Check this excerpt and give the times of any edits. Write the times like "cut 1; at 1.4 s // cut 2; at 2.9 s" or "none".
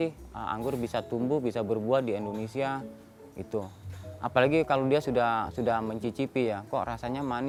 none